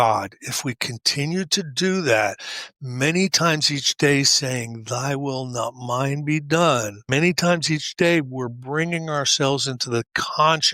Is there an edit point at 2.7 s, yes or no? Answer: no